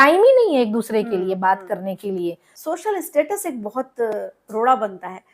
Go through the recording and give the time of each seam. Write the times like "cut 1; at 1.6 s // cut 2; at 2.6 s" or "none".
cut 1; at 2.5 s